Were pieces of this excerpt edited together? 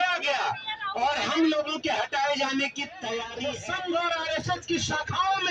yes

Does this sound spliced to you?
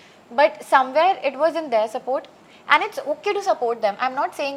no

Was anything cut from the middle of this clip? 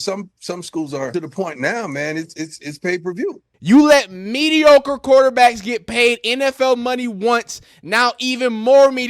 yes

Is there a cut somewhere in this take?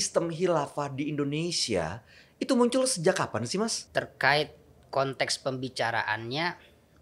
yes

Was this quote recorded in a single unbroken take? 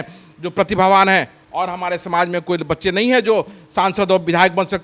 yes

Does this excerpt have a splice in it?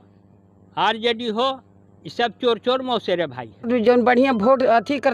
yes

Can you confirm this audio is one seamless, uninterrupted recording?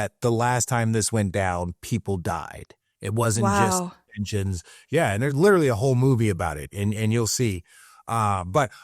yes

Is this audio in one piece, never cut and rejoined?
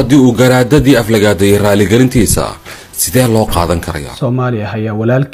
no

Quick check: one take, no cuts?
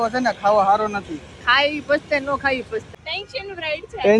no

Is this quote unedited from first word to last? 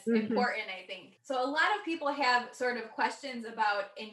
no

